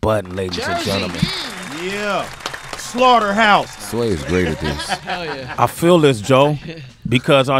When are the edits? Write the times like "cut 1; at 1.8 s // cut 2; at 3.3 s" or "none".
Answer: cut 1; at 4.7 s